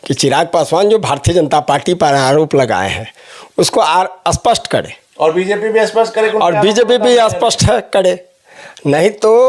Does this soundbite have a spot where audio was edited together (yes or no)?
no